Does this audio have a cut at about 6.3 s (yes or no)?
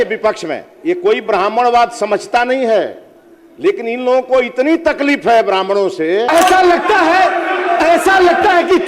yes